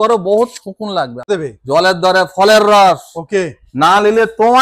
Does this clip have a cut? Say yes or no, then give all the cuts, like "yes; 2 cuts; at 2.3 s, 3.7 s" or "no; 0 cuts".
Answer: yes; 1 cut; at 1.3 s